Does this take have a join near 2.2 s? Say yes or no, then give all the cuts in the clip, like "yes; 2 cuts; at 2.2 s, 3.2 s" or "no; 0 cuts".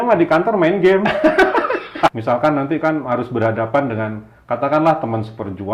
yes; 1 cut; at 2.2 s